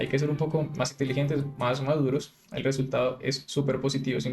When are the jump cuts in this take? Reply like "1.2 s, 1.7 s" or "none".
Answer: 2.4 s